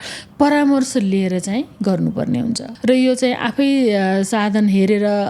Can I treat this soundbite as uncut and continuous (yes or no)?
no